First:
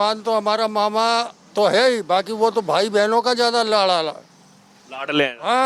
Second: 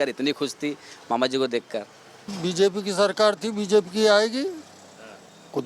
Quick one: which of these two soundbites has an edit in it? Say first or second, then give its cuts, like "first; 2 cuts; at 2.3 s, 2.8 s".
second; 1 cut; at 2.4 s